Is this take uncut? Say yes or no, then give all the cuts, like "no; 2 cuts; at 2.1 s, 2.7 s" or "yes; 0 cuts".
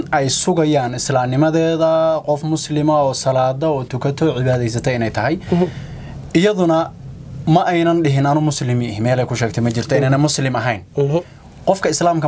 yes; 0 cuts